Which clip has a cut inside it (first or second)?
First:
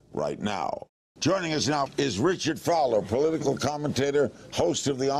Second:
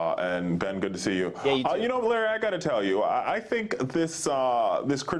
first